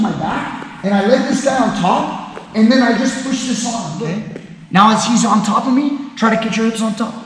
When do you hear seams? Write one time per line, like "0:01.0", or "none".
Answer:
0:04.1